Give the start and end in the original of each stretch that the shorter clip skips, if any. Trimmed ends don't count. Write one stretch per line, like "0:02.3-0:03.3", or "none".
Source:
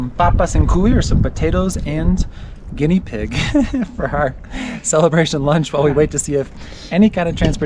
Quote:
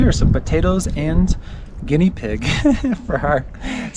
none